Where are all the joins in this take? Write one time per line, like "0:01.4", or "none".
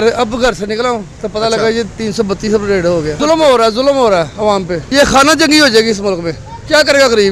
none